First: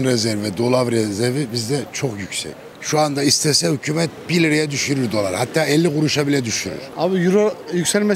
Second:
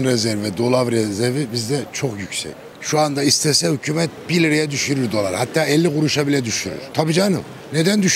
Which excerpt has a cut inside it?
first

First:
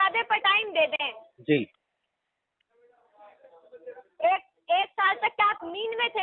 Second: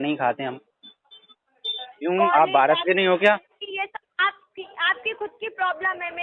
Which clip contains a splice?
second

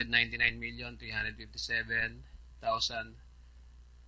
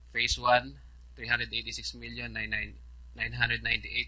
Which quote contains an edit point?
first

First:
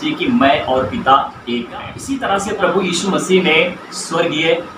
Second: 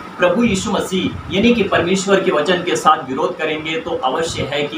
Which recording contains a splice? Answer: first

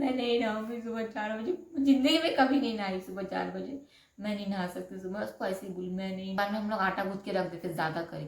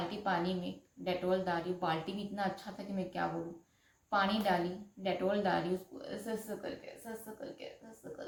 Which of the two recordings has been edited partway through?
first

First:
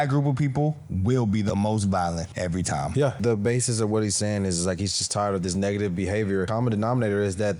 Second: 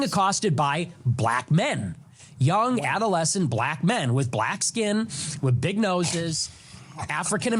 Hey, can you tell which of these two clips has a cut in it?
first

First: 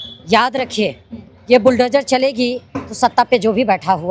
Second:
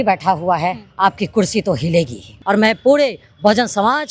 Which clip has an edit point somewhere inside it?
second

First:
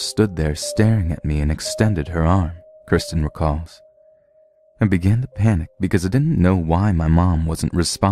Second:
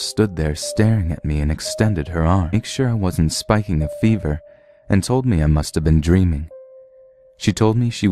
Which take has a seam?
first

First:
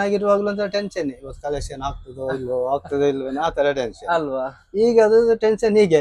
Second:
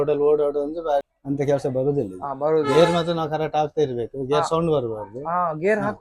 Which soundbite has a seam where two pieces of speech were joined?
second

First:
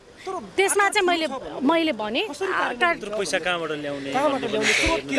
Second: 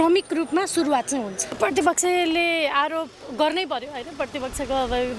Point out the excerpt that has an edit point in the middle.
second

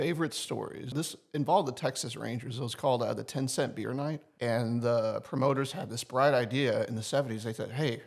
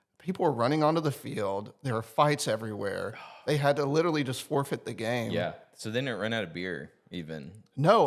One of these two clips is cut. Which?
first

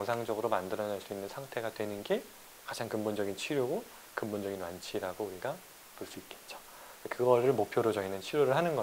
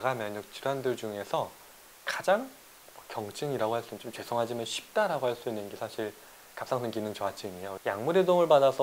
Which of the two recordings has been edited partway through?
second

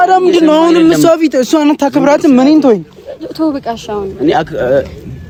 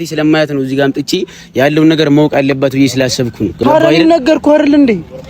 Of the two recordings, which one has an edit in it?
second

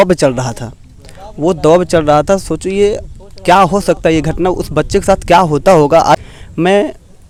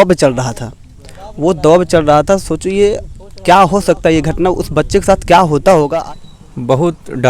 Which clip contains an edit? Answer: second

